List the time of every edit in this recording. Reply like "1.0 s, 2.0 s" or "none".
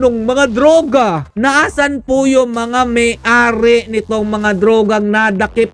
1.3 s